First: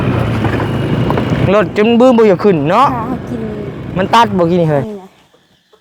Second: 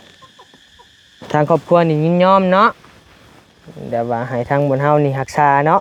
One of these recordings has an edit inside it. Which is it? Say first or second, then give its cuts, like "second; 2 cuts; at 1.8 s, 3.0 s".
first; 1 cut; at 4.8 s